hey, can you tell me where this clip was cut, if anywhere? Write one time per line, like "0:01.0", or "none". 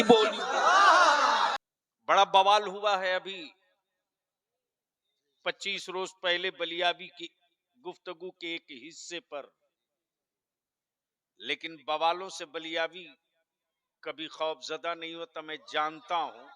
0:01.7

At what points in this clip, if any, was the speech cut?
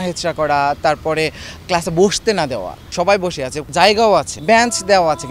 0:02.8
0:03.6
0:04.3

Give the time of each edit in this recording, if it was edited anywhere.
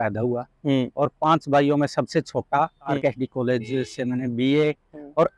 0:03.0

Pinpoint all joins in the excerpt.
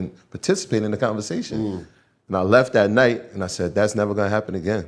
none

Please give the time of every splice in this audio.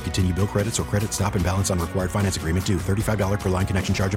none

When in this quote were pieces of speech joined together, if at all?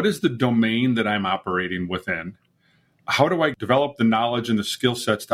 0:03.5

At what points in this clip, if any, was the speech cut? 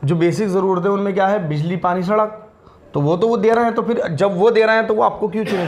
none

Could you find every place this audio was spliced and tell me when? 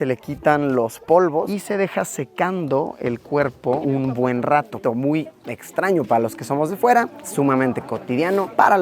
0:01.5
0:03.8
0:04.7

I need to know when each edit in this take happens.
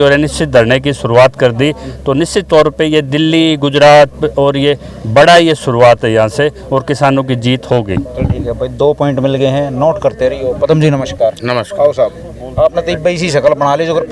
none

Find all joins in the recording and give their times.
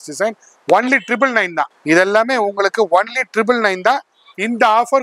0:01.7

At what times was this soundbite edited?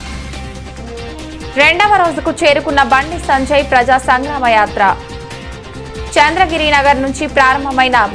none

